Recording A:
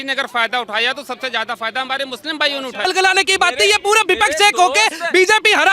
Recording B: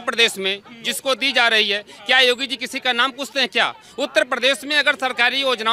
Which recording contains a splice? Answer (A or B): A